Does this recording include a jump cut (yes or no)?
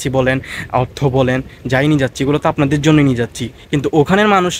no